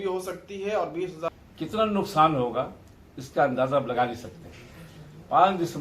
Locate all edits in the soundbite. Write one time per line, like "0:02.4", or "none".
0:01.3